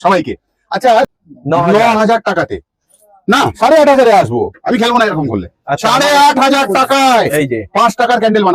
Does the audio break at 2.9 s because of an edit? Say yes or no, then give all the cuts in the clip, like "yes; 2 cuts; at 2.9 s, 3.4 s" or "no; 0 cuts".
no; 1 cut; at 1.1 s